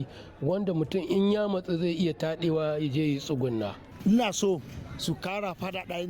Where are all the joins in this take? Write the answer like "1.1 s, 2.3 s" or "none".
3.8 s